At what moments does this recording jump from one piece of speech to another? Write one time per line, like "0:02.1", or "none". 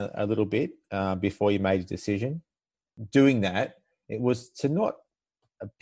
0:02.8